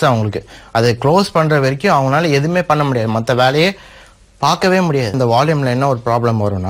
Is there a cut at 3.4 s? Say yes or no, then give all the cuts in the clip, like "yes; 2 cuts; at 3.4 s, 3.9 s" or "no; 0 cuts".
no; 1 cut; at 5.2 s